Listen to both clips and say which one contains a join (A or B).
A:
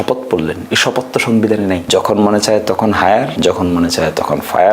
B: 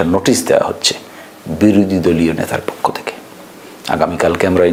A